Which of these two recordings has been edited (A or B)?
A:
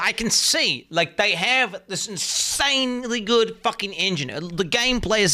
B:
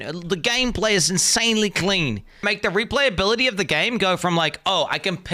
B